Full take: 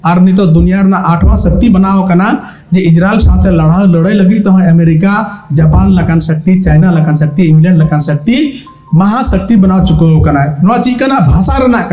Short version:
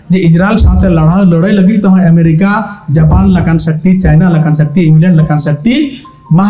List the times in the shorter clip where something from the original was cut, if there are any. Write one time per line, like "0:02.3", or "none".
none